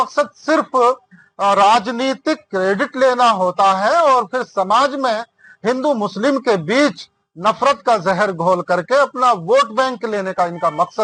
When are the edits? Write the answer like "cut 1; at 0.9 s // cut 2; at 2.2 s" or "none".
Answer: none